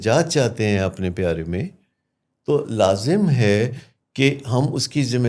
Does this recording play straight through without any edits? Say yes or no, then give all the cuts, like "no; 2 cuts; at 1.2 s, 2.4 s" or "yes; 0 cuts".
yes; 0 cuts